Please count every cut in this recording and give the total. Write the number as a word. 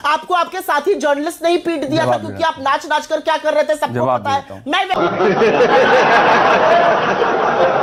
zero